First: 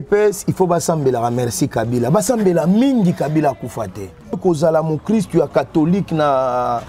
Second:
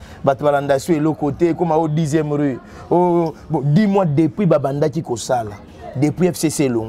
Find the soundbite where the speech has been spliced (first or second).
first